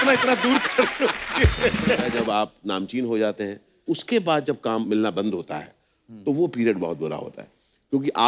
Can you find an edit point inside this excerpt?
yes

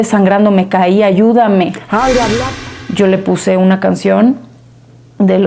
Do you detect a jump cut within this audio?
yes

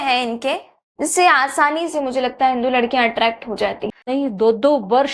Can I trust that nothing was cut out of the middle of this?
no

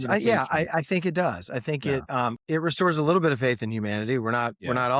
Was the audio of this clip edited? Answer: yes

